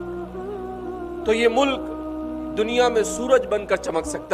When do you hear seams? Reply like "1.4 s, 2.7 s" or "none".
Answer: none